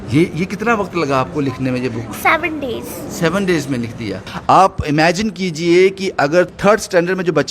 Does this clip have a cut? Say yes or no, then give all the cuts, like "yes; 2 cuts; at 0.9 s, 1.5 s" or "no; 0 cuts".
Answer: yes; 2 cuts; at 4.3 s, 6.5 s